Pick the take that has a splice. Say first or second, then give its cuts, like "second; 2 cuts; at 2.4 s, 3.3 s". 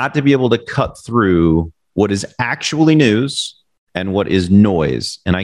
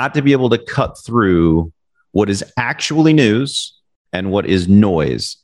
first; 1 cut; at 1.8 s